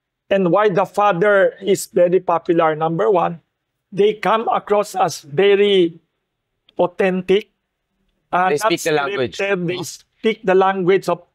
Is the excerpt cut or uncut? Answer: uncut